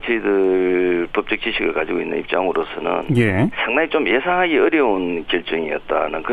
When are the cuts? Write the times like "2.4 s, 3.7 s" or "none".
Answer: none